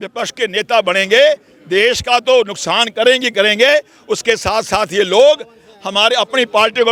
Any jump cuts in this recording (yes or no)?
no